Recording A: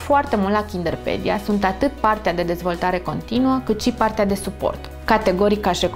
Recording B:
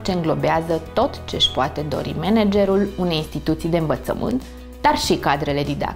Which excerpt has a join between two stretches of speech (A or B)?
A